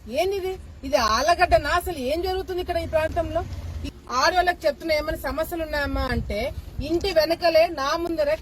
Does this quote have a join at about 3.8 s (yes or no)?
yes